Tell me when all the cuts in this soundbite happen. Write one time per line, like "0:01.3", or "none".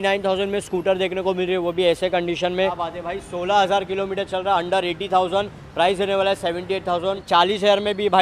0:02.9
0:07.2